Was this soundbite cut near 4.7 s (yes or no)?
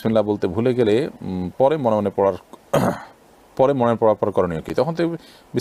no